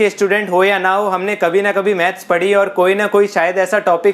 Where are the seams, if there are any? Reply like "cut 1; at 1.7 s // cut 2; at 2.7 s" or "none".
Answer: none